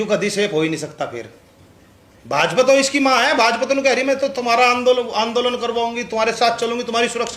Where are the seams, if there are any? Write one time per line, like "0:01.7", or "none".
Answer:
none